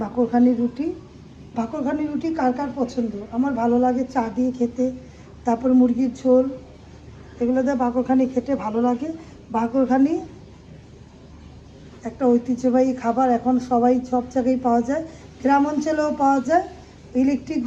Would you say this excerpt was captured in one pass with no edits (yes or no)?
yes